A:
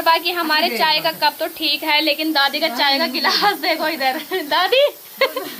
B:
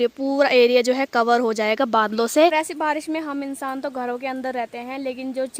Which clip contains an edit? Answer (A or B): B